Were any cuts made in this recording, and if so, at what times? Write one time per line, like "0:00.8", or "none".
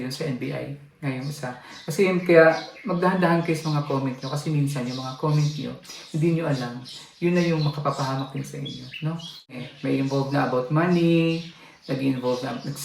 0:09.5